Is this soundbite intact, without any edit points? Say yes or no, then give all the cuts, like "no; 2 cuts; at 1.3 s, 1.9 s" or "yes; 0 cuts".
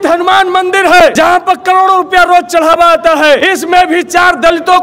no; 2 cuts; at 1.1 s, 3.4 s